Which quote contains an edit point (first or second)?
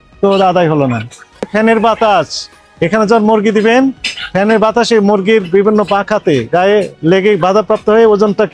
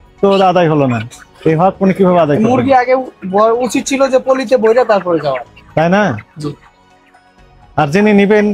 first